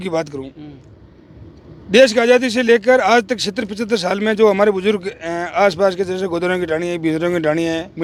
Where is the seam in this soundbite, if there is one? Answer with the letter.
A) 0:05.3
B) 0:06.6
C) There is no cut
C